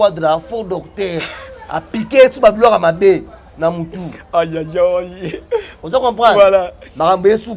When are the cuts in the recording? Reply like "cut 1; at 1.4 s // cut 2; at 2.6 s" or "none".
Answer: none